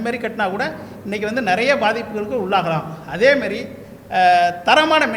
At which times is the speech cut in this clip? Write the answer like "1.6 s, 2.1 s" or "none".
none